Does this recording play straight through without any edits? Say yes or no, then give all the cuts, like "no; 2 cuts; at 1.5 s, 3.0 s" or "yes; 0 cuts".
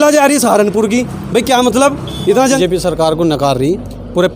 no; 1 cut; at 2.6 s